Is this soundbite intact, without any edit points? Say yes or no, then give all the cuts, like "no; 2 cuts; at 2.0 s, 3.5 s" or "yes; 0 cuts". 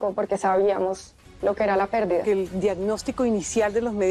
no; 1 cut; at 2.2 s